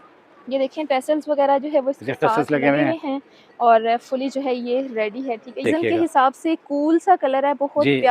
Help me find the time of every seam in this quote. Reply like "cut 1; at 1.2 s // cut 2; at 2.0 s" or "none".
cut 1; at 5.6 s